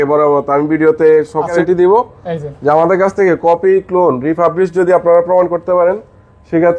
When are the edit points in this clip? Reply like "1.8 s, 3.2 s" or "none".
1.6 s